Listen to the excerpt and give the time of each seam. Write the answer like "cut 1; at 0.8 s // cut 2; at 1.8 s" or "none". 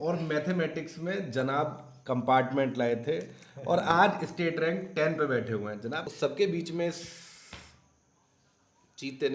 cut 1; at 6.1 s